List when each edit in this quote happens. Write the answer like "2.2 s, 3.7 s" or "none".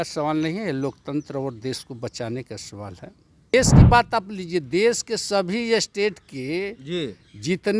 3.5 s